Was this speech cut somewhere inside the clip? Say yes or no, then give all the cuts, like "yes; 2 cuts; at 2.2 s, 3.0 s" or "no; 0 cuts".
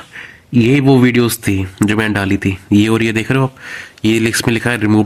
no; 0 cuts